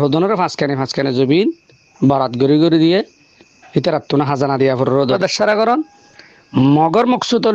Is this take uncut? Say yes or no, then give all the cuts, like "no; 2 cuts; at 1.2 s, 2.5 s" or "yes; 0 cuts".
no; 1 cut; at 5.2 s